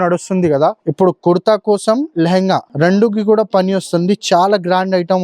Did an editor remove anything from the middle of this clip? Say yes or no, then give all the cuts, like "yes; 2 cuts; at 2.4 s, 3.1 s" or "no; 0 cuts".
yes; 2 cuts; at 0.8 s, 2.7 s